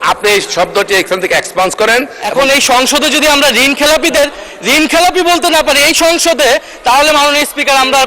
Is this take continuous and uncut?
no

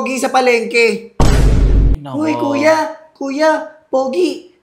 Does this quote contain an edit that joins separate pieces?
yes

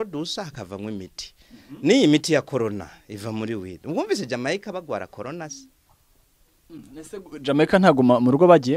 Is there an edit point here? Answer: no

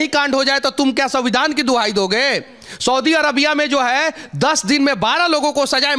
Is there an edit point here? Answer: no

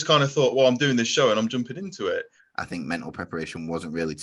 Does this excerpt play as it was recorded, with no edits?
no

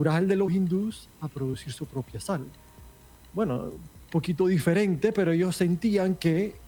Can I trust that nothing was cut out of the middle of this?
yes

